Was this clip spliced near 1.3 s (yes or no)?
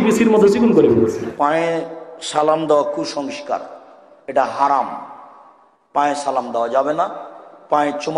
yes